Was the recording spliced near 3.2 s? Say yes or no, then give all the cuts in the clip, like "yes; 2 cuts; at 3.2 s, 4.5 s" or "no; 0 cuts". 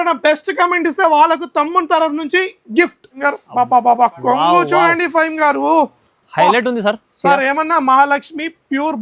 yes; 1 cut; at 3.2 s